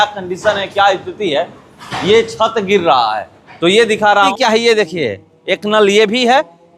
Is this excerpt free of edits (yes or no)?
no